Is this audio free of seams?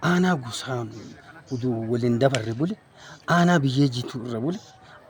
yes; 0 cuts

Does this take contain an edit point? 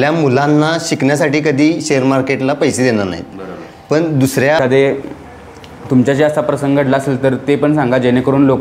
yes; 1 cut; at 4.6 s

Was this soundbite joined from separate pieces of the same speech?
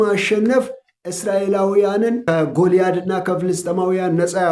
yes; 1 cut; at 2.2 s

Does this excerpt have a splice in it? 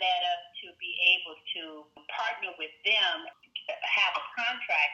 yes; 2 cuts; at 2.0 s, 3.3 s

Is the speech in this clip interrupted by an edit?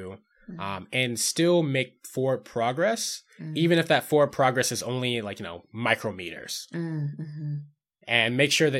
no; 0 cuts

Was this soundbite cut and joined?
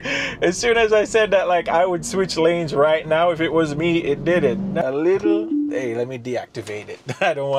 yes; 1 cut; at 4.8 s

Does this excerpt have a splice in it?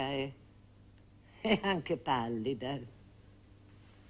yes; 1 cut; at 1.8 s

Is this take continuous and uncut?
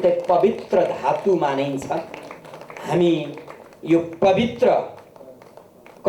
yes; 0 cuts

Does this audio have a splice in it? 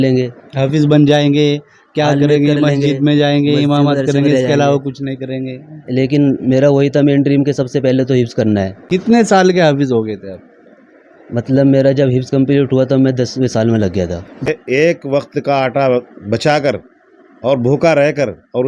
yes; 2 cuts; at 8.8 s, 14.5 s

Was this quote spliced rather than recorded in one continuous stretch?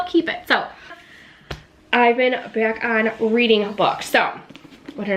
yes; 1 cut; at 1.0 s

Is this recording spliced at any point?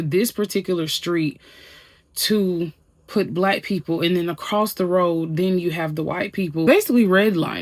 yes; 1 cut; at 6.7 s

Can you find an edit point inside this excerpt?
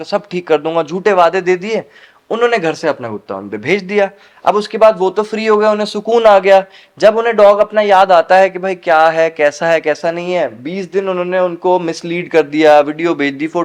no; 0 cuts

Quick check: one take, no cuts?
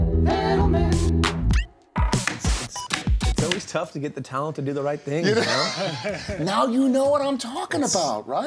no; 1 cut; at 1.4 s

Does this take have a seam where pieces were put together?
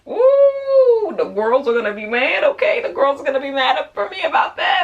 no; 0 cuts

